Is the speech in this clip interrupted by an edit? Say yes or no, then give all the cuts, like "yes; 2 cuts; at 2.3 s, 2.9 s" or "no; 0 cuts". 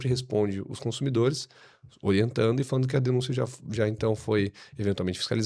no; 0 cuts